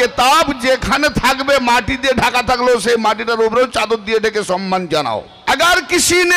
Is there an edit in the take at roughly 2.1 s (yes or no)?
no